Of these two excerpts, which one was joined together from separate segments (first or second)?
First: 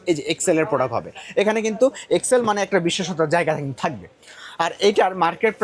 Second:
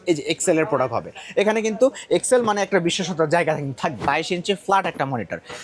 second